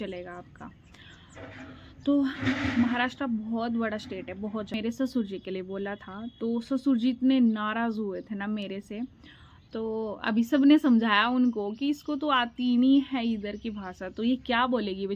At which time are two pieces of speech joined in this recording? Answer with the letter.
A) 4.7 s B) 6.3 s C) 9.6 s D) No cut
A